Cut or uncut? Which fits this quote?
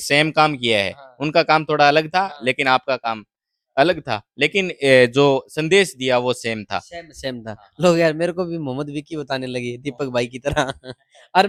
uncut